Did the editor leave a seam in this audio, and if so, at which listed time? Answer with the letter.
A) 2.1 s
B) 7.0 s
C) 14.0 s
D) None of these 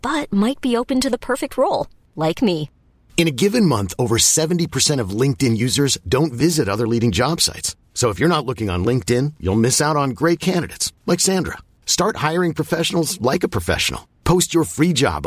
D